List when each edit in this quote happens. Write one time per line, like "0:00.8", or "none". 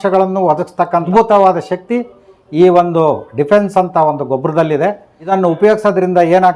0:01.1
0:05.3